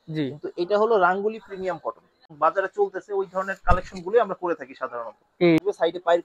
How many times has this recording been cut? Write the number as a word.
two